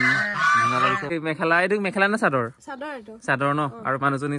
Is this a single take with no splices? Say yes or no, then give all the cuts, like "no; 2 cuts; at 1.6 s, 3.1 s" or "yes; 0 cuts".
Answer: no; 1 cut; at 1.0 s